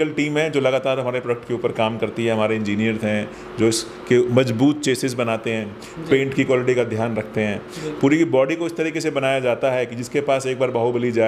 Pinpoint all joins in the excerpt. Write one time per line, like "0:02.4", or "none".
none